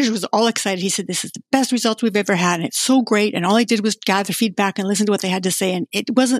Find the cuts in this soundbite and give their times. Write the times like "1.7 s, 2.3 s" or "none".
none

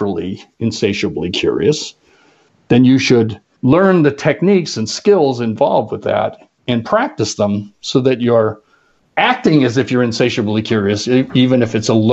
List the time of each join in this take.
3.4 s

